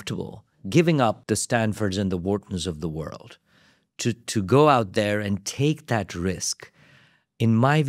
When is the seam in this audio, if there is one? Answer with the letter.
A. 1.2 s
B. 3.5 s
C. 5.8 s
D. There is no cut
A